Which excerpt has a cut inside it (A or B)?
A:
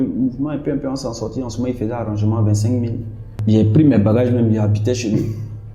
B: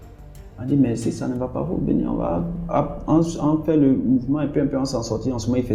A